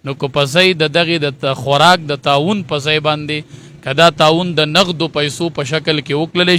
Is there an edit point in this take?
no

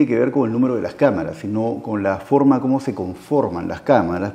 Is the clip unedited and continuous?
yes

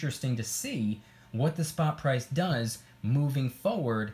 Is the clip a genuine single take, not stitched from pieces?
yes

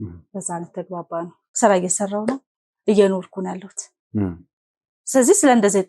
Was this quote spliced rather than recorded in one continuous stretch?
yes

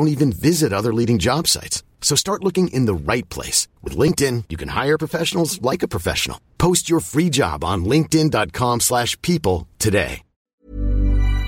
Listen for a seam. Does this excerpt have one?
yes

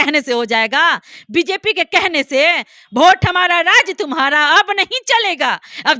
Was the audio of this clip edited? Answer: no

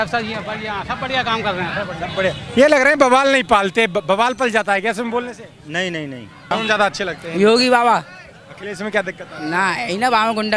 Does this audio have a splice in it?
yes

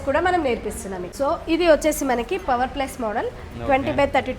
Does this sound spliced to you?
yes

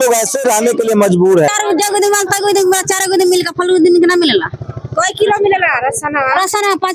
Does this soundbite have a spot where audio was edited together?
yes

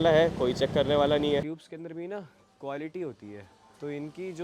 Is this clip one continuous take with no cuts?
no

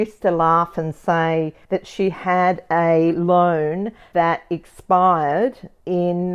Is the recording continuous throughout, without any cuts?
yes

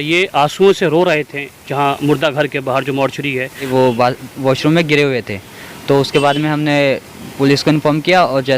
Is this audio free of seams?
no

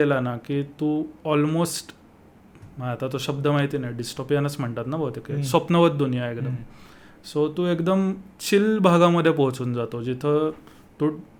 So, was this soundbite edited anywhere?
no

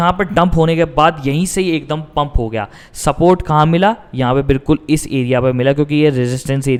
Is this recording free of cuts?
yes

